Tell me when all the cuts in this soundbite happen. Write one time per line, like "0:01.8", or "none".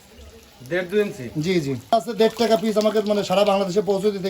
0:01.9